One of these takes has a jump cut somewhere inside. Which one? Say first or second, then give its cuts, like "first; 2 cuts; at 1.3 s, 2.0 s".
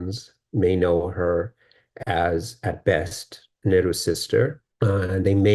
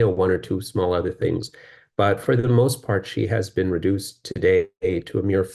first; 1 cut; at 4.6 s